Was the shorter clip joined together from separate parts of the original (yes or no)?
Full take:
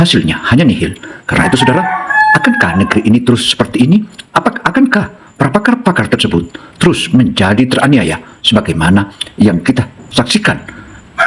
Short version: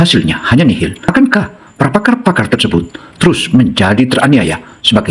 yes